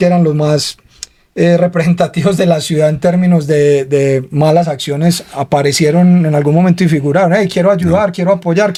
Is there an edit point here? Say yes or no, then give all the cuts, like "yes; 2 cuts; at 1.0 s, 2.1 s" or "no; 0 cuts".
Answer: no; 0 cuts